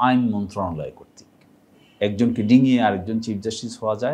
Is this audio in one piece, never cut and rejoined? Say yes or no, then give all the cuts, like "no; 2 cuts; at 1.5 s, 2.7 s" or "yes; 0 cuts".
no; 1 cut; at 1.8 s